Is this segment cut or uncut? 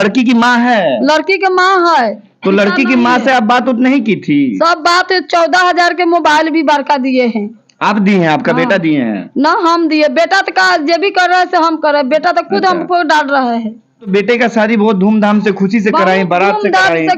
cut